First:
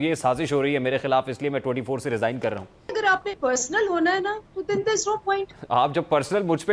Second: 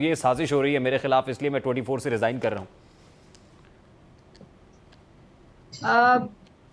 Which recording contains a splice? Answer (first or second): first